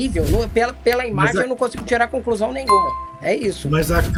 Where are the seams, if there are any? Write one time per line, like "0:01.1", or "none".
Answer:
none